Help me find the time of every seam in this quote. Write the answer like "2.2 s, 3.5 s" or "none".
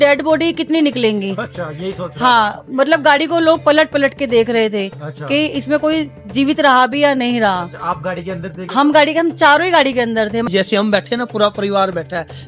10.4 s